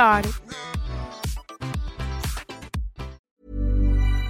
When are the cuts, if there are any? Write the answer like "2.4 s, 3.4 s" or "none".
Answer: 3.3 s